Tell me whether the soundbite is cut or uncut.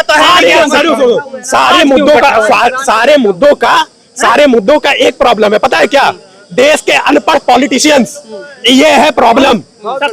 uncut